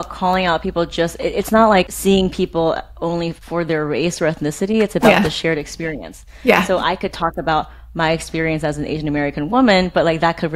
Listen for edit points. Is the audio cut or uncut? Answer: cut